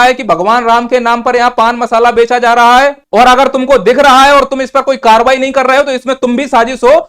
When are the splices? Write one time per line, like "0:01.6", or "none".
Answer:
0:03.0